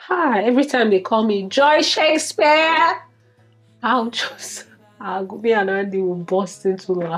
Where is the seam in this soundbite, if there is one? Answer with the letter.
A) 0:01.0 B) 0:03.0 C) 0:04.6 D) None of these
D